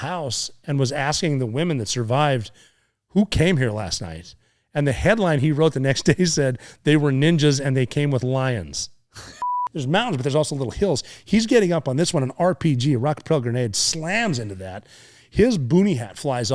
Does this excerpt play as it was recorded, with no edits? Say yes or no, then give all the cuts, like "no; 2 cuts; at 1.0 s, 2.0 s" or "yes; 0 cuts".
no; 1 cut; at 9.4 s